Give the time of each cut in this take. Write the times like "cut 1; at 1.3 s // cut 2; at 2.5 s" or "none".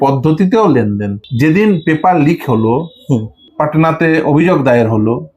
cut 1; at 1.2 s // cut 2; at 3.4 s

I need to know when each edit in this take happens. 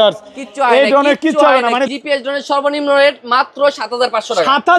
cut 1; at 1.9 s

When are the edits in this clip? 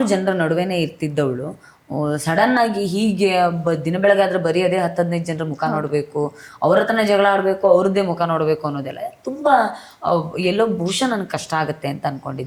none

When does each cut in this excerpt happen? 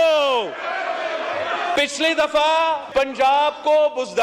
cut 1; at 1.8 s // cut 2; at 2.8 s

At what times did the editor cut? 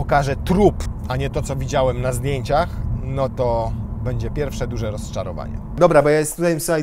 cut 1; at 0.9 s // cut 2; at 5.8 s

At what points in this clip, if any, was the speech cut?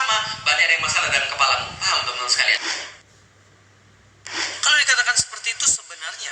cut 1; at 2.0 s

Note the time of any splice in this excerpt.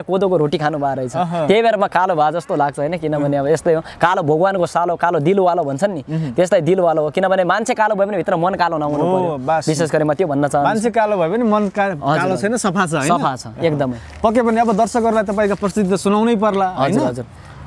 none

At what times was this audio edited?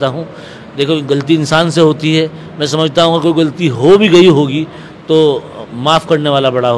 none

